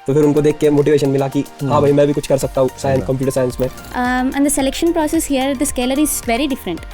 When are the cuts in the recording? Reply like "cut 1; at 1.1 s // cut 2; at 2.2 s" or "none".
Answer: cut 1; at 3.8 s